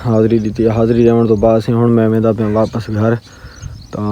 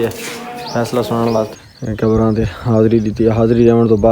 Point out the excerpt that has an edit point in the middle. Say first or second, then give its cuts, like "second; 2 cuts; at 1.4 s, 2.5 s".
second; 1 cut; at 1.5 s